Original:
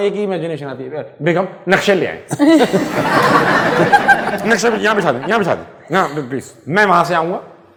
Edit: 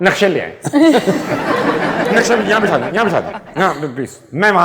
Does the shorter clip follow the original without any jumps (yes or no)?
no